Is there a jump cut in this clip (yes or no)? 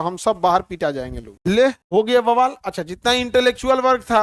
yes